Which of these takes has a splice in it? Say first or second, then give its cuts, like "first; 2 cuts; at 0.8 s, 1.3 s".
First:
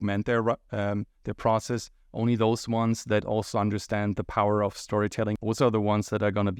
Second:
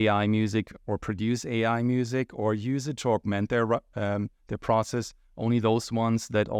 first; 1 cut; at 5.4 s